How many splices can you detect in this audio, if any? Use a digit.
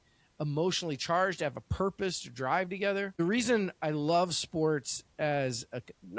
1